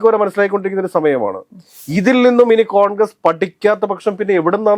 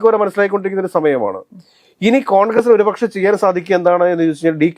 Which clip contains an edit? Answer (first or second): first